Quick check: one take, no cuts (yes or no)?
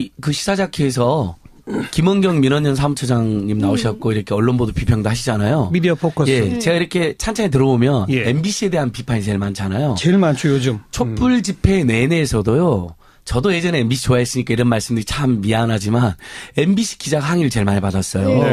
yes